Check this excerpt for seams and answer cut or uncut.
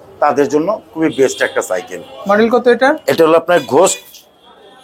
uncut